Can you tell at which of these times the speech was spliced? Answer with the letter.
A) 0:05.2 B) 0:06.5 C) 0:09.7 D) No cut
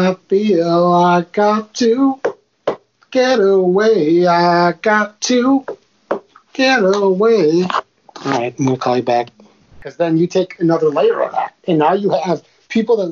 C